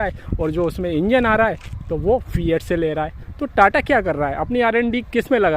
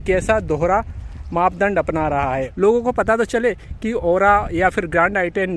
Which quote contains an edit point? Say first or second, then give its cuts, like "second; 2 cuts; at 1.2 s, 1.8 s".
second; 1 cut; at 2.5 s